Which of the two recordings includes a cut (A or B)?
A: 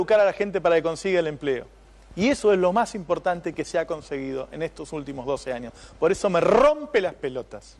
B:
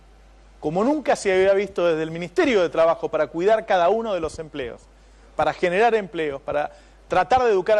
B